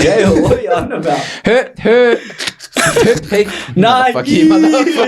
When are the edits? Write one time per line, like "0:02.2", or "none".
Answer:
none